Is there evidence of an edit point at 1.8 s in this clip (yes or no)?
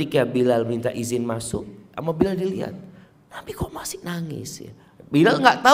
yes